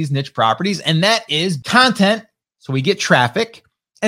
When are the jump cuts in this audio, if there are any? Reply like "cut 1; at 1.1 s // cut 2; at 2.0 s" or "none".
cut 1; at 1.6 s